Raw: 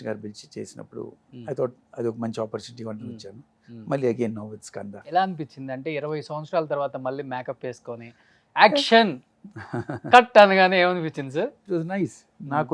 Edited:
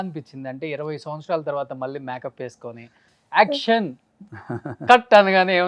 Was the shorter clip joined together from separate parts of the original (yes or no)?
no